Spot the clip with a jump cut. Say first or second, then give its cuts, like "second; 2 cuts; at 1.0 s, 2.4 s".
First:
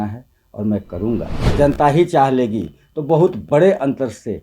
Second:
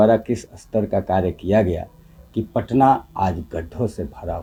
first; 1 cut; at 1.4 s